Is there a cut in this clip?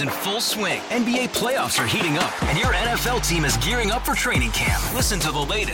no; 0 cuts

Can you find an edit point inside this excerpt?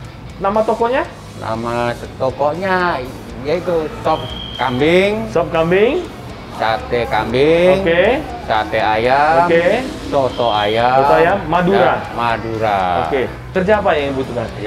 yes; 1 cut; at 13.5 s

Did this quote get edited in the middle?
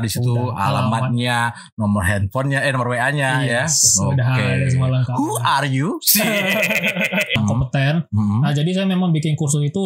yes; 1 cut; at 7.4 s

